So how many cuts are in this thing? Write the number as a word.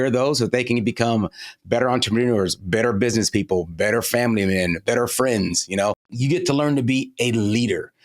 two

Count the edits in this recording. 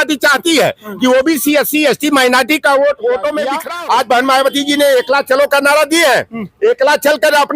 one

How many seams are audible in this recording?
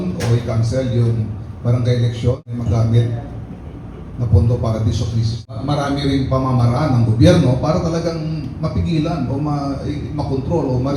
two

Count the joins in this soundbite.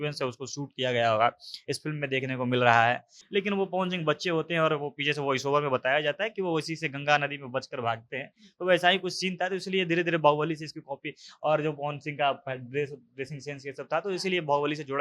one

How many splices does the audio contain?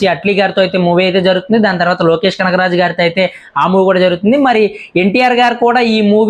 zero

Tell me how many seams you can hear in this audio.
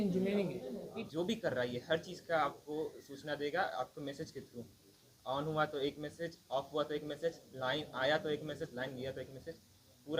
one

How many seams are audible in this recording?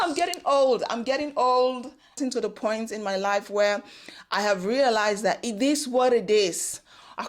one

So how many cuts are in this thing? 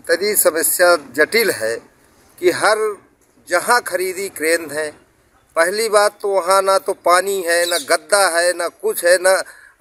zero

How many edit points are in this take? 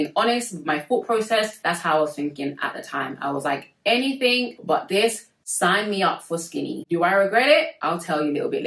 zero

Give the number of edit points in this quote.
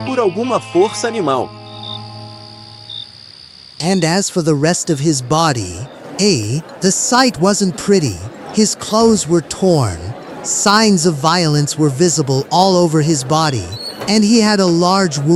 zero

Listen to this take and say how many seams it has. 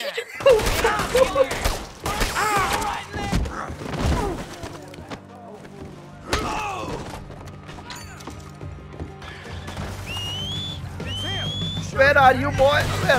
one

